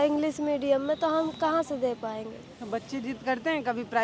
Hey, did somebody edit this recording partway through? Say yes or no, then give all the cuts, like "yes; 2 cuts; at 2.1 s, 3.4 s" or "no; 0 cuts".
no; 0 cuts